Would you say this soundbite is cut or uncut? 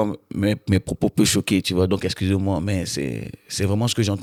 uncut